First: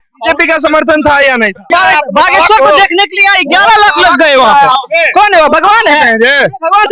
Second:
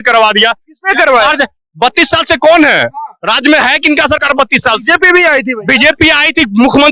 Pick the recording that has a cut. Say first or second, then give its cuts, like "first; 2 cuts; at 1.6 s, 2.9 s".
first; 1 cut; at 1.6 s